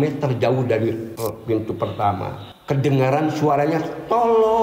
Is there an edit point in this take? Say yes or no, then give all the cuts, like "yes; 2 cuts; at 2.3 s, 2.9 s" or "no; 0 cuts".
yes; 2 cuts; at 1.1 s, 2.5 s